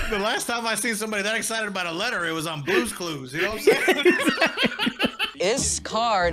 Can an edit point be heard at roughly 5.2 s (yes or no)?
yes